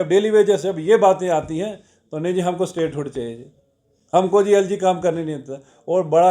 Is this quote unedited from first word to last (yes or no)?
yes